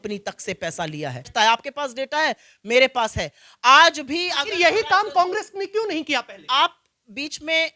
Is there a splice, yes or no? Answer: yes